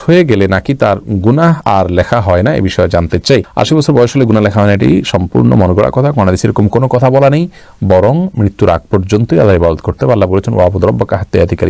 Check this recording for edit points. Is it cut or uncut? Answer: uncut